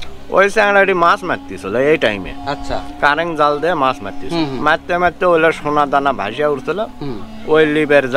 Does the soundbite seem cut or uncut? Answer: uncut